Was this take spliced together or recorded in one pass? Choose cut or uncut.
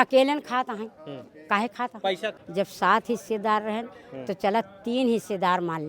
cut